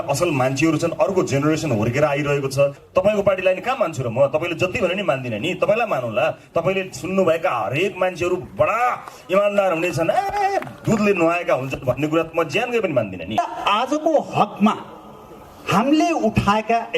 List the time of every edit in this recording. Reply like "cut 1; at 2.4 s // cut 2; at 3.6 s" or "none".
cut 1; at 2.8 s // cut 2; at 13.4 s